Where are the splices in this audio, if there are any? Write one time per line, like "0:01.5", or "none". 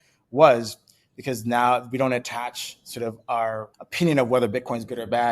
0:03.8